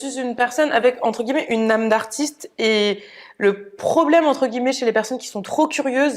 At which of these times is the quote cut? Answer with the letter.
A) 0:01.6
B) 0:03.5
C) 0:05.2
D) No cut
A